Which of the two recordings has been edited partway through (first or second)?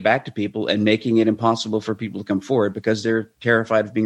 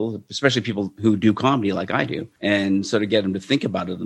second